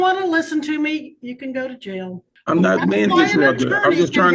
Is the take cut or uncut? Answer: cut